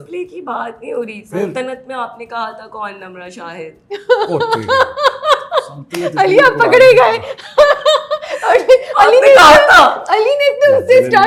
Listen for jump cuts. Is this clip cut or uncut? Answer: uncut